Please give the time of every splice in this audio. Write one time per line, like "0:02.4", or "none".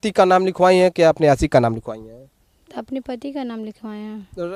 none

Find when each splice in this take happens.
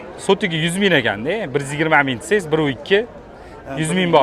none

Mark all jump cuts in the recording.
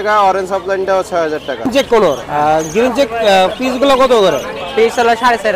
0:01.7

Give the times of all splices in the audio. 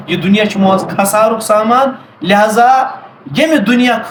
none

